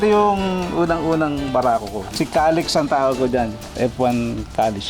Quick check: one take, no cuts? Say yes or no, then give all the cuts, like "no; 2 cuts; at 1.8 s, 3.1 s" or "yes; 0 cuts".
no; 1 cut; at 2.1 s